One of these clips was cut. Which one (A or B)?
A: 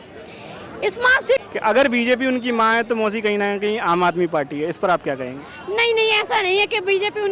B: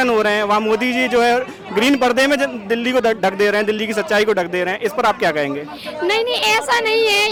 A